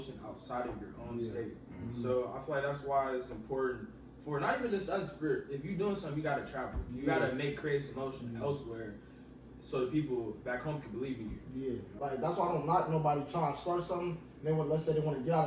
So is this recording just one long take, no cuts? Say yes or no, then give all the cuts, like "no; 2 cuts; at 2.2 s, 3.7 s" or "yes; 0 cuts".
no; 1 cut; at 11.9 s